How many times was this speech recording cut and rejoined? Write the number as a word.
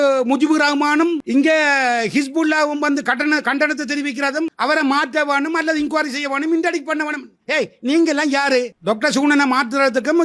zero